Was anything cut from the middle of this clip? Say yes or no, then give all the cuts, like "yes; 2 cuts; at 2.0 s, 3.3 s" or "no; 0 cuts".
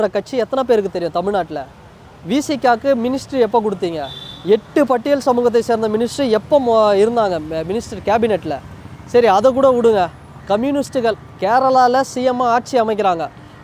no; 0 cuts